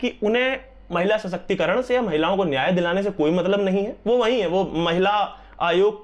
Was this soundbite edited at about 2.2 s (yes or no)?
no